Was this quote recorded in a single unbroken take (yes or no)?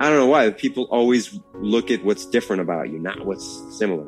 yes